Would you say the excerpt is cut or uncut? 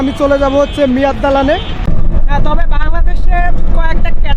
cut